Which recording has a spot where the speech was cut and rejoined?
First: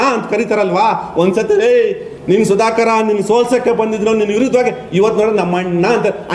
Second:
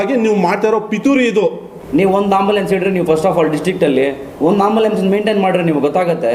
second; 2 cuts; at 1.8 s, 4.2 s

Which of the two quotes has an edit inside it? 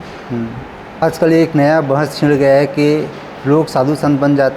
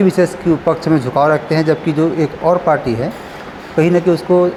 first; 1 cut; at 1.0 s

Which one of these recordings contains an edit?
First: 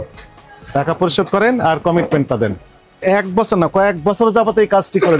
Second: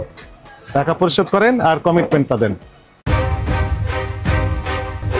first; 1 cut; at 3.0 s

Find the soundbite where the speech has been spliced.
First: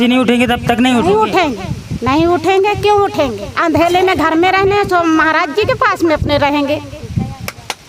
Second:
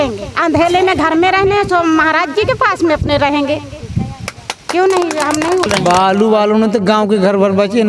second; 1 cut; at 5.7 s

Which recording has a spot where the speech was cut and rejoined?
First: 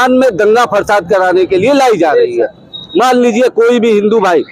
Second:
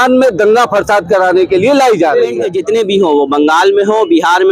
second; 1 cut; at 2.5 s

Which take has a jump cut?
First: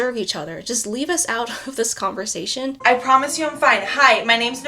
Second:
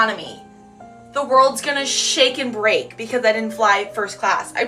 first; 1 cut; at 2.8 s

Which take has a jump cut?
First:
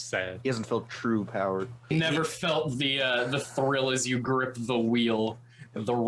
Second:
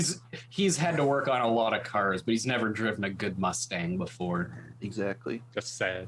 first; 1 cut; at 1.9 s

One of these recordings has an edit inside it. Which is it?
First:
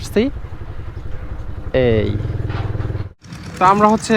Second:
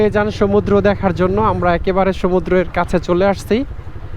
first; 1 cut; at 3.2 s

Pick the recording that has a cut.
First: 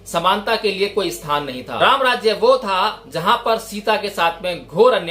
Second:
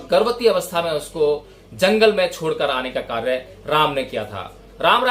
first; 1 cut; at 1.6 s

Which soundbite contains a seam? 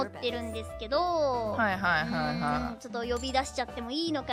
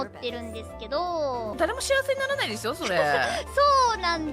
second; 1 cut; at 1.5 s

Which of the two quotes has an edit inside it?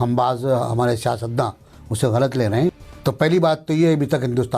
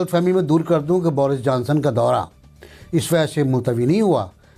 first; 1 cut; at 2.9 s

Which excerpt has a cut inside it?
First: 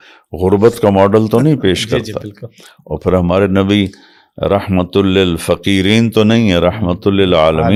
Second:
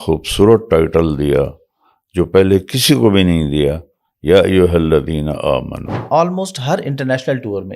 second; 1 cut; at 5.9 s

